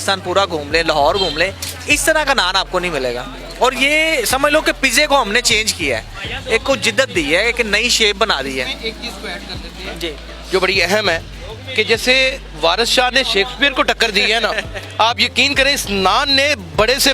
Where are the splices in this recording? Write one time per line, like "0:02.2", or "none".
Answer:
none